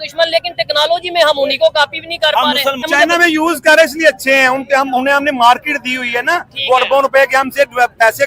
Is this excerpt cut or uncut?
cut